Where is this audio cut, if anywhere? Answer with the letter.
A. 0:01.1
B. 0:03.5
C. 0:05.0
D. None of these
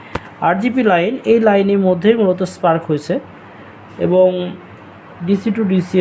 D